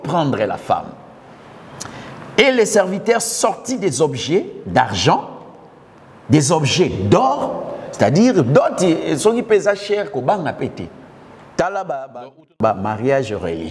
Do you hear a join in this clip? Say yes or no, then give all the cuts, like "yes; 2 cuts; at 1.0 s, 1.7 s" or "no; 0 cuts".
yes; 1 cut; at 12.6 s